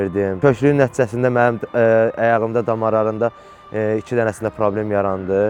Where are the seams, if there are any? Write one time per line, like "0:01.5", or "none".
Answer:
none